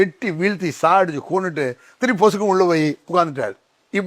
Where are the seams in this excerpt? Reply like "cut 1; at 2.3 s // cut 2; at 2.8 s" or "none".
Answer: none